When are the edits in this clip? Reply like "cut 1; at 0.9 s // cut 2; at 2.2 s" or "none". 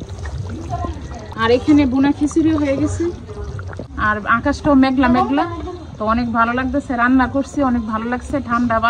cut 1; at 1.4 s // cut 2; at 3.9 s